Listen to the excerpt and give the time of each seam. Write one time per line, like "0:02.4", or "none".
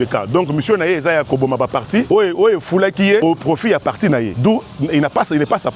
0:02.1
0:03.2
0:04.3